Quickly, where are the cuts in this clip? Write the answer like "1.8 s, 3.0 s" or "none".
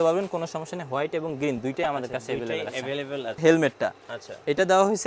3.4 s